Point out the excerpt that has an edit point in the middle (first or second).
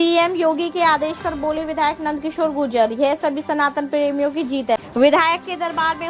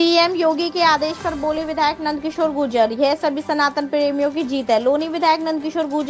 first